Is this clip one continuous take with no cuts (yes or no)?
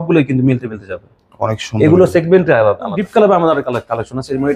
no